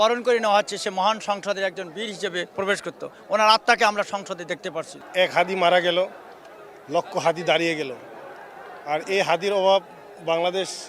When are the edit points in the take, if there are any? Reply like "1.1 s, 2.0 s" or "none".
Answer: none

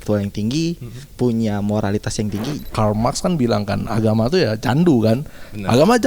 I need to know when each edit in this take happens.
2.6 s

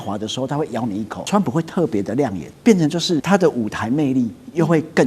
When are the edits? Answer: 1.1 s, 2.5 s, 3.2 s

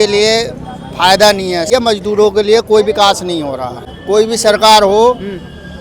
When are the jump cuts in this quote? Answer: 1.7 s, 3.9 s

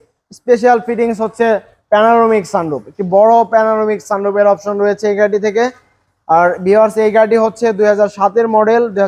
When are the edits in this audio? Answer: none

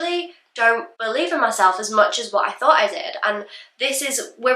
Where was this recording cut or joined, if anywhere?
0.9 s

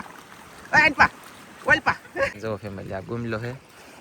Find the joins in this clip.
2.4 s

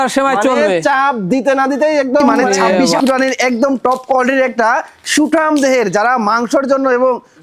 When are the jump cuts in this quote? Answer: 2.9 s

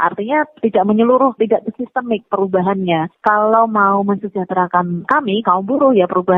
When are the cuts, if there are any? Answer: 3.1 s, 5.1 s

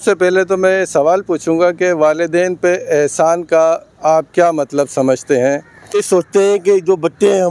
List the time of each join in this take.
5.9 s

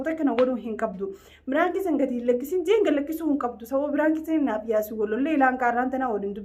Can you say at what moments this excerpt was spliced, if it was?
none

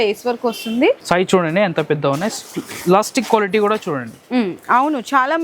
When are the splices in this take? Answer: 1.0 s

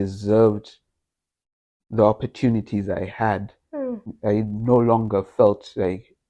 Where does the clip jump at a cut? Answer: 4.1 s

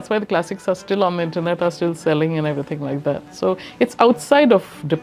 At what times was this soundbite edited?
none

